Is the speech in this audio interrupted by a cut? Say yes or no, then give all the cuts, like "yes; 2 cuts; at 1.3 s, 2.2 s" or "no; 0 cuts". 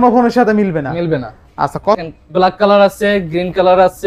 yes; 1 cut; at 1.9 s